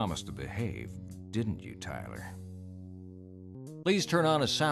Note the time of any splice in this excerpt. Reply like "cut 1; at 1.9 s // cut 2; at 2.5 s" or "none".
cut 1; at 2.1 s // cut 2; at 3.5 s